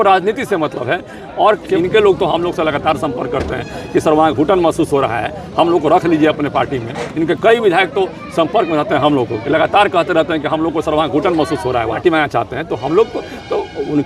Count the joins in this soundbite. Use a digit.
2